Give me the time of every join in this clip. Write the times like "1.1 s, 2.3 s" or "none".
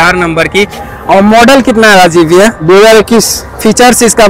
none